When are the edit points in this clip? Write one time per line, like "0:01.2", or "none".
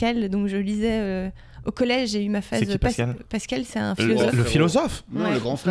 none